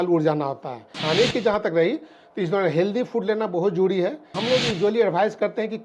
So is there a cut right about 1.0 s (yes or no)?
yes